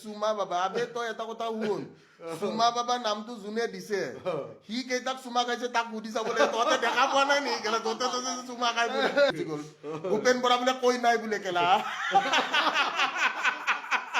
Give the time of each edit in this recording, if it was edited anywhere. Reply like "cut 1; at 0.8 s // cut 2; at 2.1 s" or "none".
cut 1; at 9.3 s